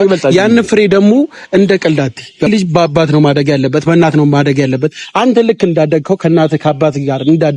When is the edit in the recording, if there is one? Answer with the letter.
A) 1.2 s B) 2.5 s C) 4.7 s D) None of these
B